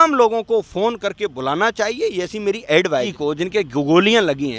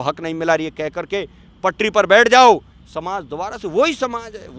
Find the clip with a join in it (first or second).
first